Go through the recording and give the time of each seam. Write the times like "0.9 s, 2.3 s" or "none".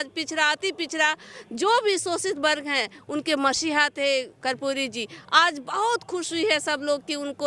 none